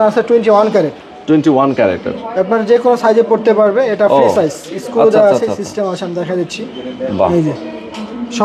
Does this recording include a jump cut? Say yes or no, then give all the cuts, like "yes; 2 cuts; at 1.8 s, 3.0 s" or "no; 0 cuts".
no; 0 cuts